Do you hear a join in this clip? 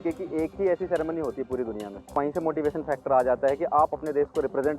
yes; 2 cuts; at 2.1 s, 3.9 s

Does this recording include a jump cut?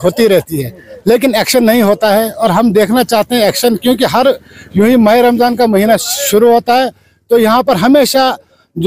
no; 0 cuts

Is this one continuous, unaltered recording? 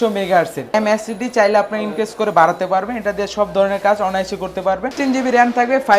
no; 2 cuts; at 0.7 s, 4.9 s

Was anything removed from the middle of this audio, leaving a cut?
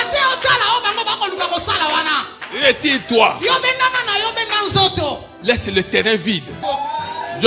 yes; 2 cuts; at 5.3 s, 6.6 s

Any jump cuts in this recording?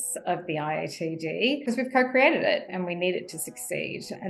yes; 1 cut; at 1.6 s

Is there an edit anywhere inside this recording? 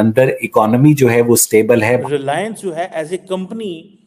yes; 1 cut; at 2.0 s

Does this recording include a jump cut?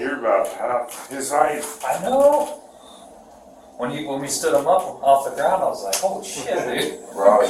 no; 0 cuts

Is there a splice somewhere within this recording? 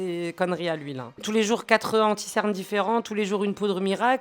yes; 1 cut; at 1.2 s

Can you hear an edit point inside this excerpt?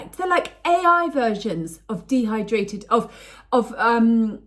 no; 0 cuts

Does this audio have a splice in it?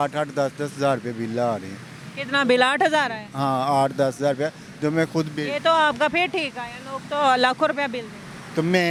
no; 0 cuts

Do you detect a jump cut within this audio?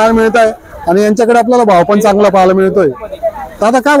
no; 0 cuts

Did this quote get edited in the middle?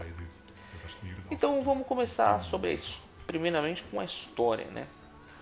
no; 0 cuts

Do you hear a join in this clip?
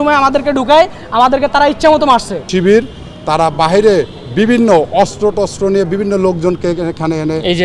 yes; 1 cut; at 2.5 s

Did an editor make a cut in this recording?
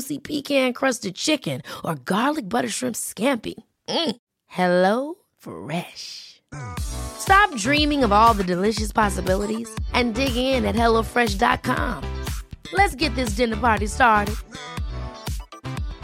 no; 0 cuts

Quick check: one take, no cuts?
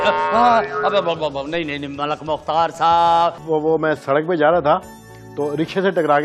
no; 1 cut; at 3.4 s

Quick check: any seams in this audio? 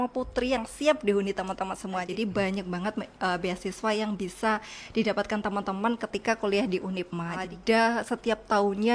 yes; 2 cuts; at 2.1 s, 7.4 s

